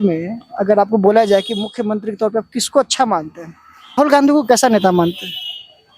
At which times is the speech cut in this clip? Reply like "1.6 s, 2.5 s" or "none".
3.9 s